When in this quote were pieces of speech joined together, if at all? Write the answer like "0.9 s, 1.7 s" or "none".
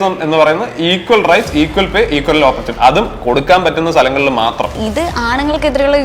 4.8 s